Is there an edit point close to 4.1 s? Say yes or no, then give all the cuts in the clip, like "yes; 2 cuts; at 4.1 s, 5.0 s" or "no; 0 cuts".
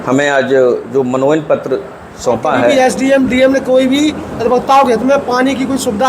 no; 1 cut; at 2.7 s